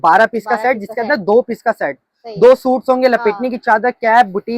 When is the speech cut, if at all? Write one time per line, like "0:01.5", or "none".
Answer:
none

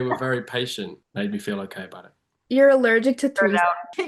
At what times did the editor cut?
0:01.0

